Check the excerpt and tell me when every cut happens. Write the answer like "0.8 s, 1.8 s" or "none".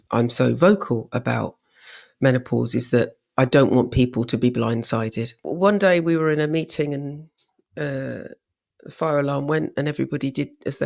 5.4 s

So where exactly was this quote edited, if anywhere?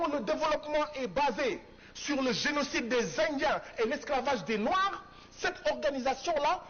none

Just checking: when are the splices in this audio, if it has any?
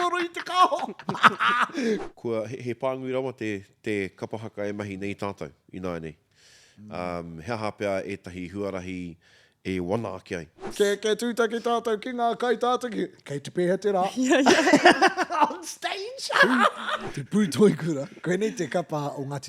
2.0 s, 10.7 s, 17.1 s

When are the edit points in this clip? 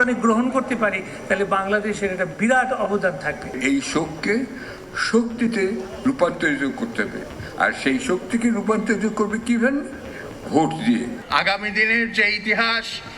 3.6 s, 11.2 s

